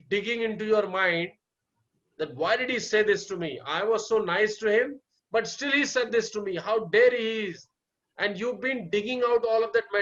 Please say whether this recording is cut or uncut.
cut